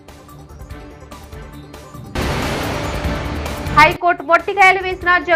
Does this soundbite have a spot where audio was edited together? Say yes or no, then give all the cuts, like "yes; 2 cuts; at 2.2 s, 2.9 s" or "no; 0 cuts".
no; 0 cuts